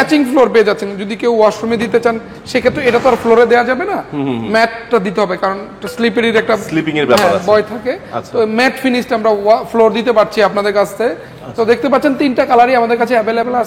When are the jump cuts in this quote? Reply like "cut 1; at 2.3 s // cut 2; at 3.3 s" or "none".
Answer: none